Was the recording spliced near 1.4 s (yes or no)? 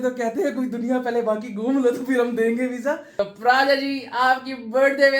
no